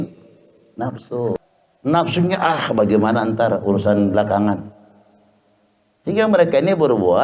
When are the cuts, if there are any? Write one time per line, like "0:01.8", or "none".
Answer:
0:01.4